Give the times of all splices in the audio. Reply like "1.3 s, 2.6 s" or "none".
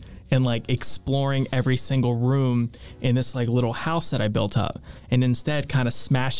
none